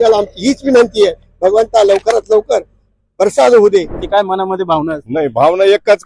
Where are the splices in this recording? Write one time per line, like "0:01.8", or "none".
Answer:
0:04.0